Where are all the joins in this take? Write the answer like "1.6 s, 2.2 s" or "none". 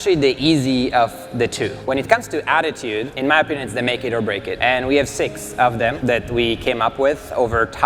1.8 s, 3.1 s, 4.5 s, 6.0 s

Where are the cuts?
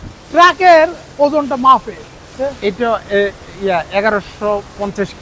2.3 s

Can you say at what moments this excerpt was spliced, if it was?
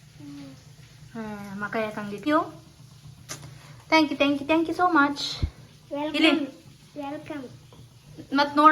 2.3 s

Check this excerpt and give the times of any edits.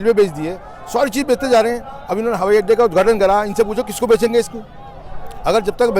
none

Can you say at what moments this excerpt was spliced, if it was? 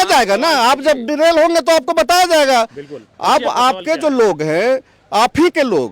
none

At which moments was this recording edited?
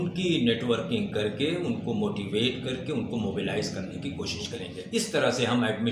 4.7 s

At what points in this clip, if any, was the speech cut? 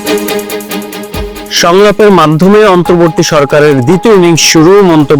1.4 s

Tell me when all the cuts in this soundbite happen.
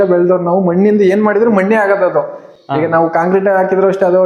none

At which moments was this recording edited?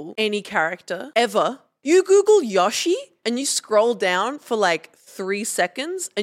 1.0 s, 1.7 s, 3.1 s

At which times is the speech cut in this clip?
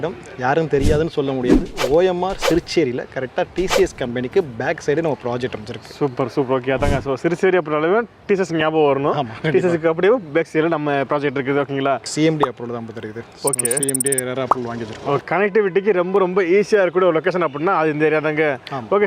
12.1 s, 15.2 s

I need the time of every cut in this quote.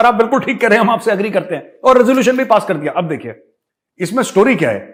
none

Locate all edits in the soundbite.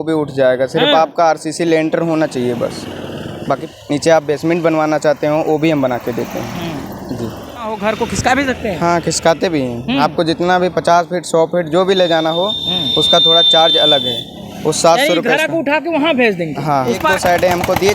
3.7 s, 7.7 s, 17.0 s

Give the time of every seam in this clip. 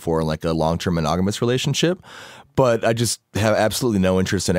none

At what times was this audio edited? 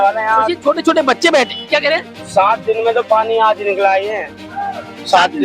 none

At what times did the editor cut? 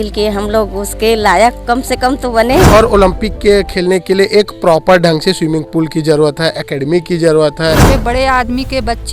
2.7 s, 7.8 s

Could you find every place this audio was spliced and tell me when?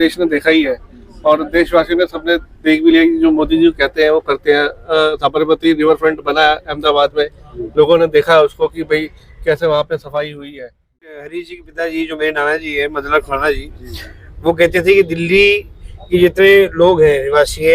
11.2 s

